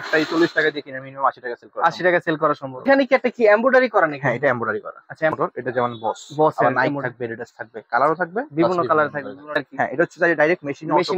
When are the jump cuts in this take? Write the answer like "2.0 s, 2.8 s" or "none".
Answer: 2.9 s, 5.3 s, 9.6 s